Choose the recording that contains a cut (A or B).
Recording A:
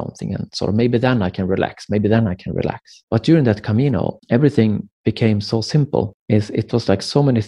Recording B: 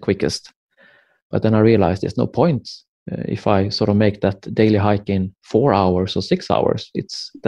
A